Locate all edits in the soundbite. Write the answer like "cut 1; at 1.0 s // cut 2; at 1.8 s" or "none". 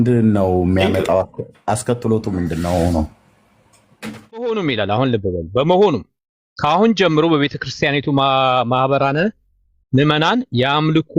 cut 1; at 4.6 s